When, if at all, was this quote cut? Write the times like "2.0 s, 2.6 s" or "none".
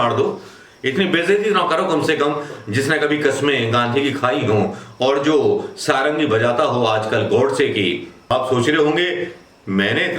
8.3 s